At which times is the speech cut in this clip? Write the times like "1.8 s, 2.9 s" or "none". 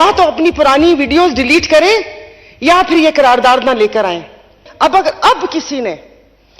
4.6 s